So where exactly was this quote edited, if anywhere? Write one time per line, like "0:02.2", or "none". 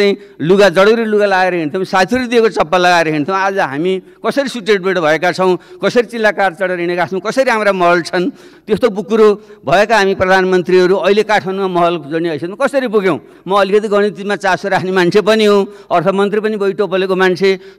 0:08.5